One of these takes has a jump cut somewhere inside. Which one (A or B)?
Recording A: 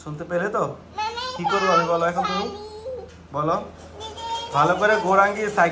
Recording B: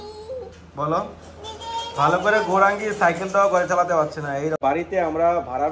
B